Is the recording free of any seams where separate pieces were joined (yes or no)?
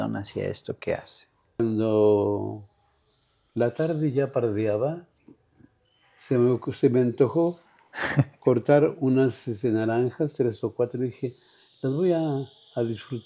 no